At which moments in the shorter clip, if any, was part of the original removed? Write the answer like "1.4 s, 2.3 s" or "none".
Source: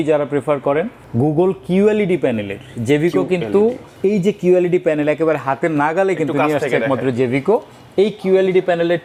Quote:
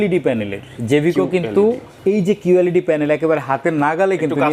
none